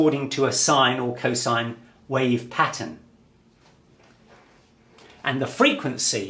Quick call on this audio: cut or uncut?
uncut